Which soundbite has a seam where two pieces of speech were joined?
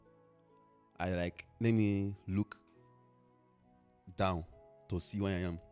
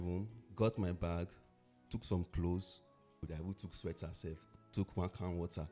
second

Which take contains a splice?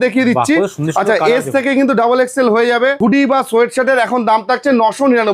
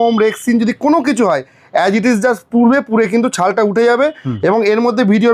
first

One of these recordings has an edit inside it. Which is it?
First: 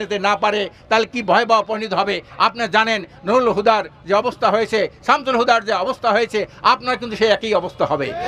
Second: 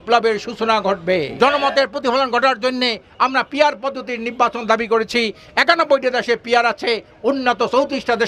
second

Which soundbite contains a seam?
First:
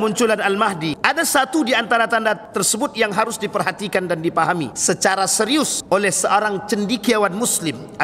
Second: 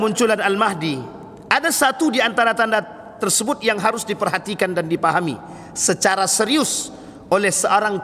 first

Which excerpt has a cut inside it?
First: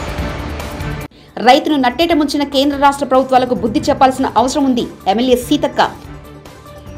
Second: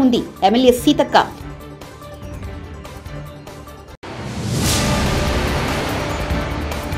first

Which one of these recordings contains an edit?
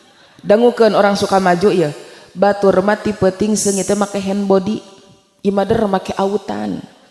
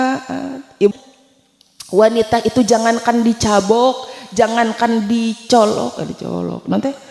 second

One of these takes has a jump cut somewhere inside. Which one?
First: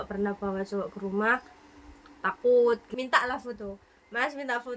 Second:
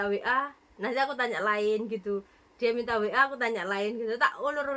first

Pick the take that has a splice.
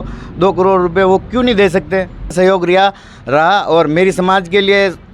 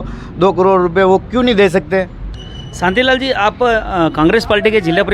first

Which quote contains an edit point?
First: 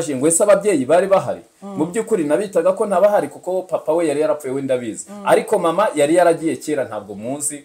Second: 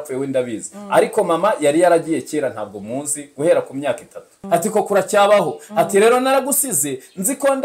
second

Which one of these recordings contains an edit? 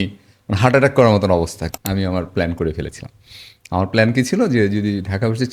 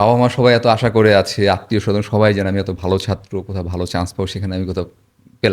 first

